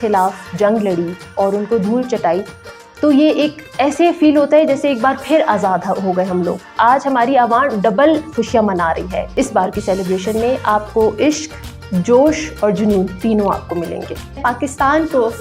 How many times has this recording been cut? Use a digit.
3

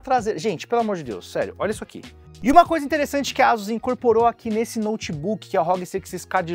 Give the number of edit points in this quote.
1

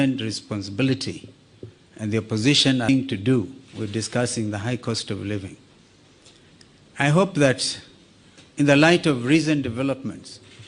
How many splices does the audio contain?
1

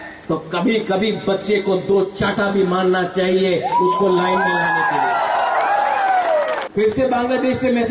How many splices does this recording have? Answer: 1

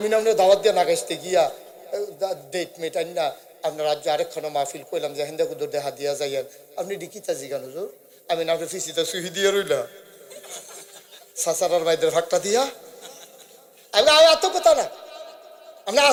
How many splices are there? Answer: 0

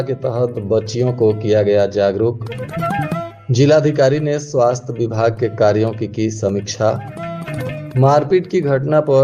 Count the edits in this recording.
0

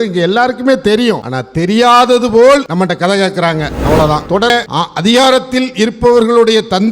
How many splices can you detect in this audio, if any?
1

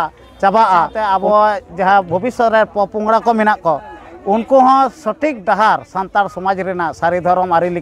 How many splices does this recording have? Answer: 1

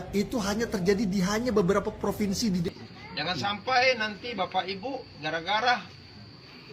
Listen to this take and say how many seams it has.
1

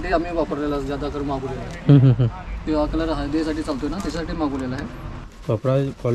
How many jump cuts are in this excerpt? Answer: 1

